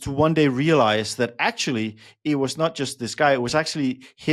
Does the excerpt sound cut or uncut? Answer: uncut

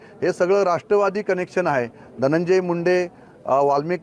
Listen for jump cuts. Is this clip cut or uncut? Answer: uncut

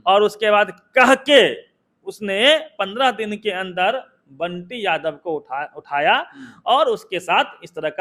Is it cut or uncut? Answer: uncut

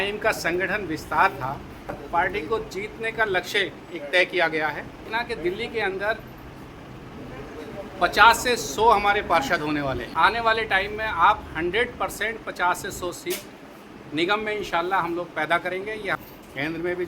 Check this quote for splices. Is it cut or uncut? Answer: cut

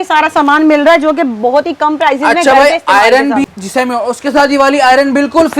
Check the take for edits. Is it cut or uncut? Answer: cut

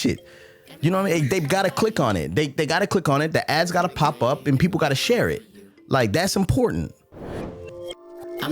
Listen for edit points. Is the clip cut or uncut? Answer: cut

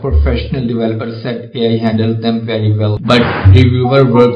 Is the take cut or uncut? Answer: cut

